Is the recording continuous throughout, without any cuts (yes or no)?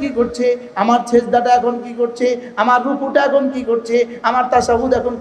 yes